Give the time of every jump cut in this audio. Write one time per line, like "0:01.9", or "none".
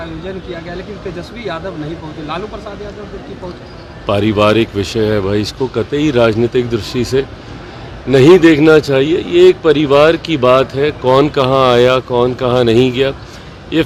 none